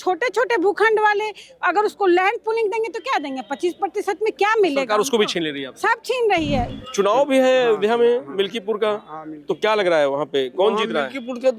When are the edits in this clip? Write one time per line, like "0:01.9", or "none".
0:06.7